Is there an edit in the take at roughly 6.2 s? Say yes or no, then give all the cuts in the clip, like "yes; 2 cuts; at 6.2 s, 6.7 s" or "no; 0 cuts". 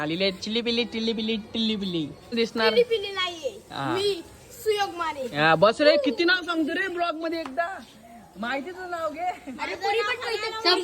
no; 1 cut; at 2.4 s